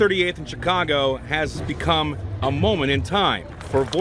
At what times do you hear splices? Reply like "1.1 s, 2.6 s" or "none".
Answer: none